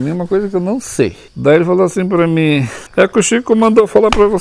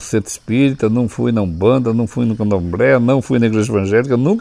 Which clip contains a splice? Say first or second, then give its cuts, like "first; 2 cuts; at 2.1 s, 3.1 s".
first; 2 cuts; at 1.2 s, 2.8 s